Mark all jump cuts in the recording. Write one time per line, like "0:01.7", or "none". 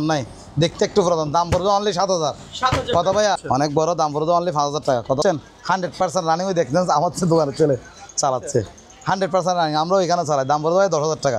0:03.4
0:05.2